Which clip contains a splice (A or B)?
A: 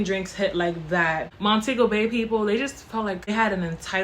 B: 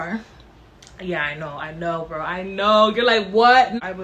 A